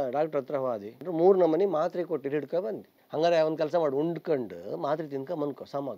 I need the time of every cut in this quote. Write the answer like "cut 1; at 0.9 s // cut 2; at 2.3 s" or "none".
cut 1; at 1.0 s // cut 2; at 2.9 s